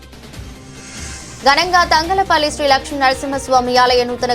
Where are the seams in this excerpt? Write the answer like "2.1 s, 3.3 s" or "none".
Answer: 1.0 s